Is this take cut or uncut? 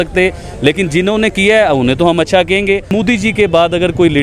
cut